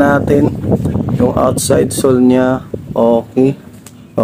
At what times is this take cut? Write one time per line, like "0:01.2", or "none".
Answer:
none